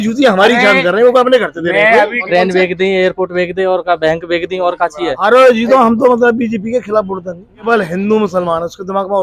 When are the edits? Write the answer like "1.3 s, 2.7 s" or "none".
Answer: 2.2 s, 5.1 s, 7.6 s